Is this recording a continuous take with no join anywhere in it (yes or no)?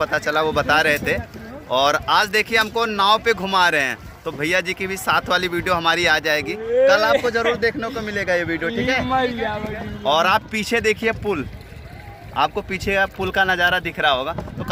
yes